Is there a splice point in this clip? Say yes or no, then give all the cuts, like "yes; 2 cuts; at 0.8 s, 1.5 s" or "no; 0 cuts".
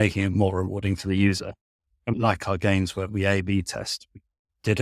yes; 1 cut; at 2.1 s